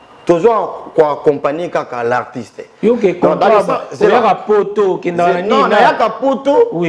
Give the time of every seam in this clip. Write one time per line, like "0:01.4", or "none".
none

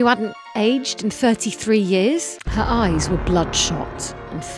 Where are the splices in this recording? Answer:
0:02.4

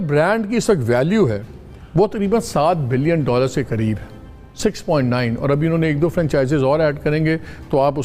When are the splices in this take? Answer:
none

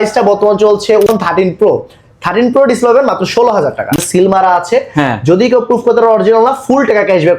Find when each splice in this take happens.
0:01.1
0:04.0

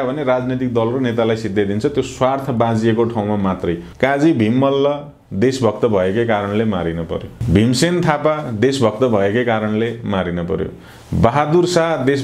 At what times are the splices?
0:03.9
0:07.4

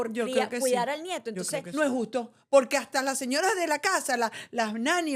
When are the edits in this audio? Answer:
0:01.6

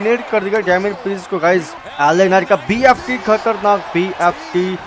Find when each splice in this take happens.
0:01.8

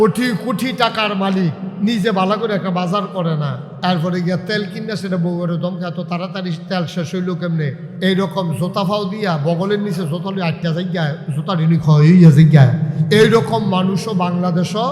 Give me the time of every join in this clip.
0:01.7
0:03.6
0:07.9
0:13.0

